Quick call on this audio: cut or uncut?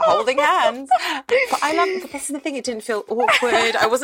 cut